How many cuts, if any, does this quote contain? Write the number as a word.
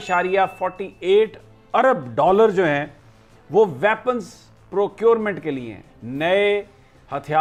zero